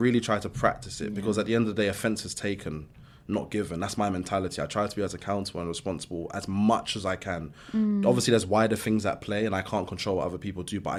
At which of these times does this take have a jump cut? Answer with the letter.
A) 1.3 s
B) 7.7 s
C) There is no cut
C